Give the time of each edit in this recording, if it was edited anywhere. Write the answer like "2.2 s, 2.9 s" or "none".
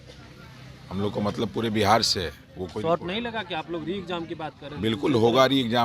none